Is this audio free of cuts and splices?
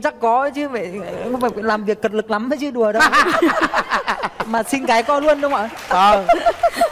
yes; 0 cuts

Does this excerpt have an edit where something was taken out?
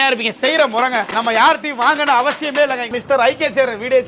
yes; 1 cut; at 2.9 s

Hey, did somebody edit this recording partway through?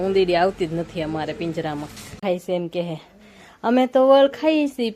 yes; 1 cut; at 2.2 s

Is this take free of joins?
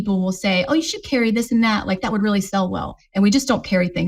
yes; 0 cuts

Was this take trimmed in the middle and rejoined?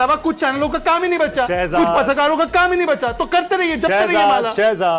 no; 0 cuts

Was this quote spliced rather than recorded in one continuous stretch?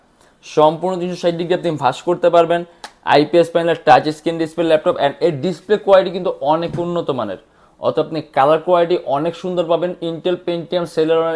no; 0 cuts

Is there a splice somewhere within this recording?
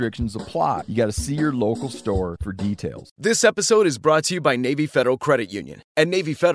yes; 1 cut; at 3.1 s

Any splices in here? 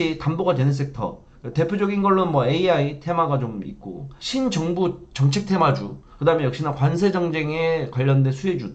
no; 0 cuts

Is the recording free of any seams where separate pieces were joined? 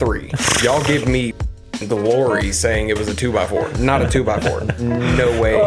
yes; 0 cuts

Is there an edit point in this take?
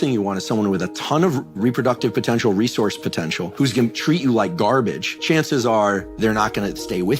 yes; 2 cuts; at 3.5 s, 5.1 s

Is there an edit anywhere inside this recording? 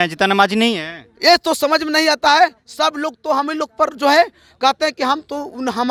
no; 0 cuts

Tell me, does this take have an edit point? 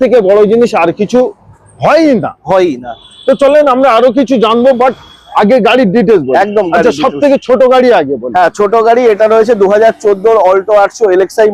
no; 0 cuts

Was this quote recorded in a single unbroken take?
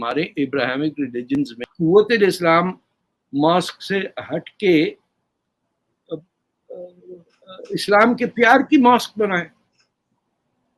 no; 1 cut; at 1.6 s

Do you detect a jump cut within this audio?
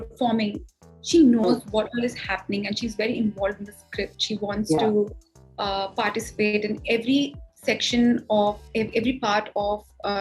no; 0 cuts

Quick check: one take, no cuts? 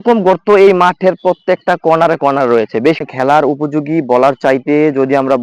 no; 1 cut; at 3.1 s

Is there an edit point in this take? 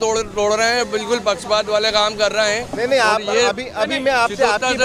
no; 0 cuts

